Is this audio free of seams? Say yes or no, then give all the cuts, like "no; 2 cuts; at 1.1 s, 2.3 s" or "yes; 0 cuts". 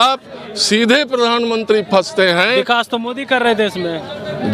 yes; 0 cuts